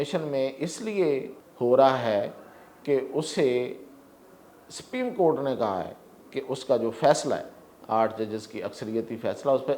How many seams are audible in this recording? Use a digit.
1